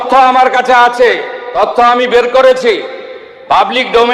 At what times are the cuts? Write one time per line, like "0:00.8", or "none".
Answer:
0:01.4

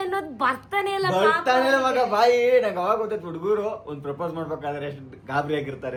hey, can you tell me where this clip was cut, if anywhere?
none

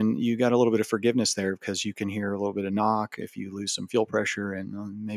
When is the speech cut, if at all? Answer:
none

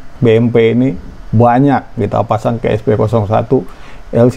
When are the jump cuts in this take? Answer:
none

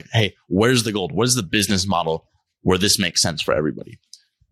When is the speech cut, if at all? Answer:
none

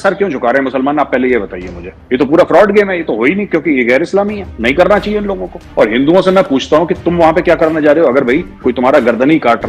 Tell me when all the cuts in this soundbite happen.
none

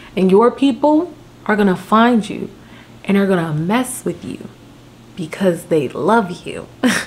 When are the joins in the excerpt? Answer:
none

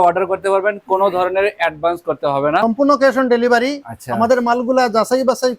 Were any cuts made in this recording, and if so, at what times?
0:02.6

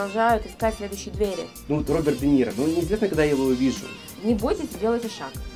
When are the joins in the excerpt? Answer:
0:01.6
0:03.9

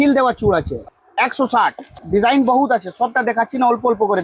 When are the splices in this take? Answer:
0:00.8
0:02.0

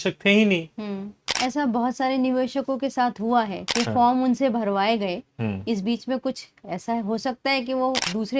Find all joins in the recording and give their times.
0:01.3

